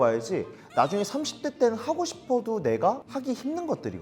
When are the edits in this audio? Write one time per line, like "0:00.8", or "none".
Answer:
0:03.0

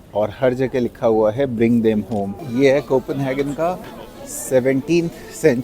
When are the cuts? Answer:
0:02.4

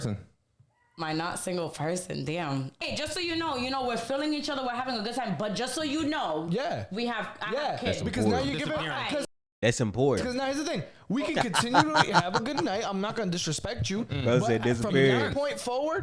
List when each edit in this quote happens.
0:02.8

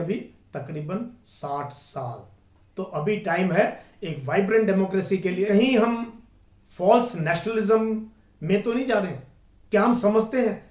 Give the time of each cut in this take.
0:05.4

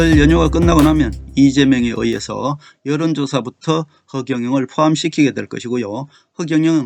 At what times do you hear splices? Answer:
none

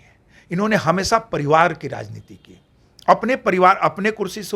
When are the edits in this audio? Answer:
none

